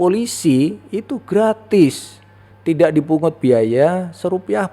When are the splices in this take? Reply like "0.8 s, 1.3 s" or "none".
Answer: none